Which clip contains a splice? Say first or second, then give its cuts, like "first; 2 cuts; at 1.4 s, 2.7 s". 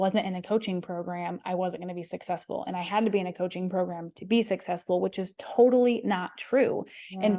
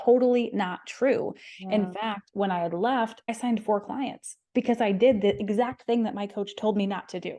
second; 1 cut; at 3.3 s